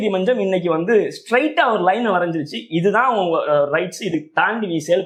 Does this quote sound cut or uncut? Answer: uncut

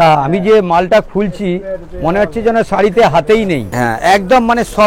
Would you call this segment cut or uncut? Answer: cut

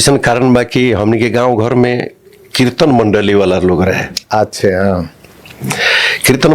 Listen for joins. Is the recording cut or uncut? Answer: uncut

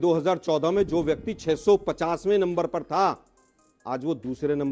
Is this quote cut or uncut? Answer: uncut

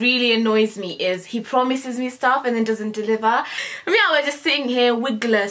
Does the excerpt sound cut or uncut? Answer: cut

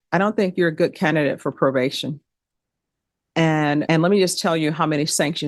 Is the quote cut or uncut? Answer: cut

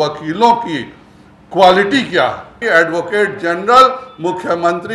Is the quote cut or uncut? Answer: cut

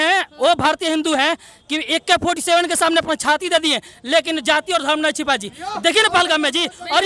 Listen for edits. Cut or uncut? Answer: uncut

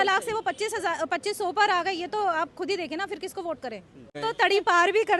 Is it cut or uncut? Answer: cut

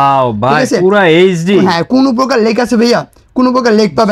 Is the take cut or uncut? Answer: uncut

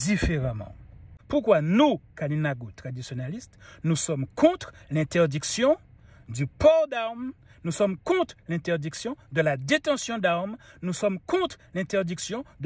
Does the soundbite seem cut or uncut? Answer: cut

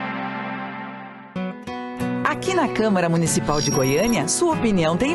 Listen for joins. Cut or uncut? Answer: cut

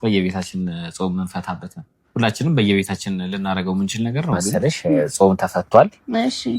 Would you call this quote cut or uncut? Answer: cut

